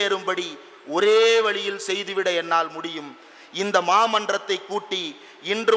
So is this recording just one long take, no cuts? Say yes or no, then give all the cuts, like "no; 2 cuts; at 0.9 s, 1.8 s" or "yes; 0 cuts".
yes; 0 cuts